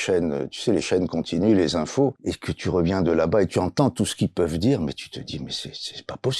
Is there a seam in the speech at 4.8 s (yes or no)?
no